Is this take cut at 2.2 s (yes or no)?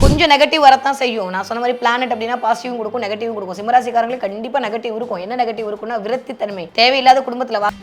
no